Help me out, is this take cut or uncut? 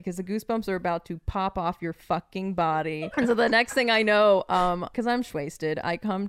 cut